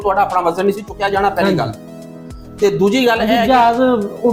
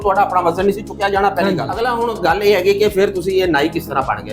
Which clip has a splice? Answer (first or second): second